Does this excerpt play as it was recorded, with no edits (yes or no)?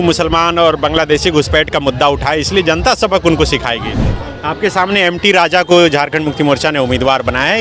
no